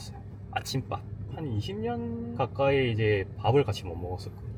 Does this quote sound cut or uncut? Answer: uncut